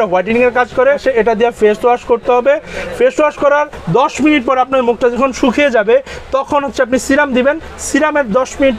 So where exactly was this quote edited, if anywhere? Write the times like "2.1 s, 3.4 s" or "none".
1.0 s